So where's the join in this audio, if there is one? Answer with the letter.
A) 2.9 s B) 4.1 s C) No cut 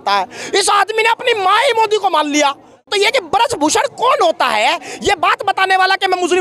A